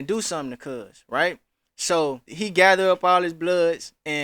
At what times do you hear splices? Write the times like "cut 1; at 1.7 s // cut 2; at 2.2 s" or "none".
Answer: cut 1; at 2.3 s